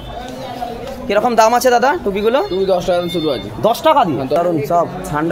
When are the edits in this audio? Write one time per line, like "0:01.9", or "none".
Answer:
0:04.4